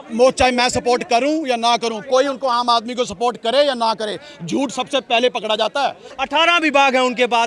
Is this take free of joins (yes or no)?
no